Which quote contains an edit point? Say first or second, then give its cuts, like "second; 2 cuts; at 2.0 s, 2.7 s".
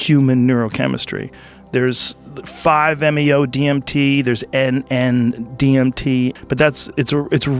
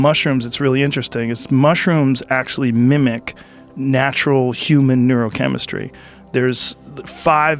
first; 1 cut; at 6.4 s